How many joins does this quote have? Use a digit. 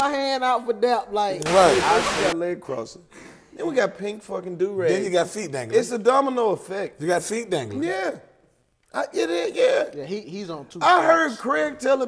1